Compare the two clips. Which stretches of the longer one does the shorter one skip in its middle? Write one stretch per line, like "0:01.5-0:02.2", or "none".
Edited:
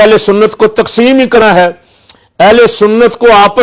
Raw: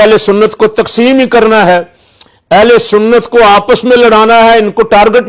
0:01.4-0:01.5

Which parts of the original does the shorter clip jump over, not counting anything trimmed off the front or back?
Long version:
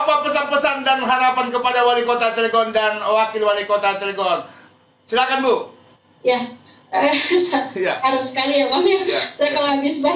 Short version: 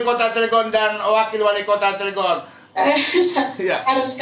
0:04.6-0:06.7

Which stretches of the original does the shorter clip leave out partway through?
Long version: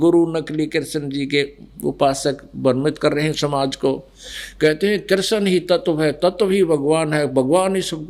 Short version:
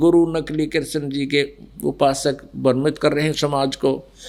none

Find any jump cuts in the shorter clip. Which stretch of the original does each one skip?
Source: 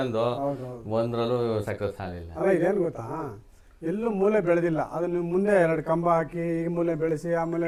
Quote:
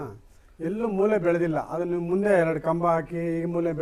none

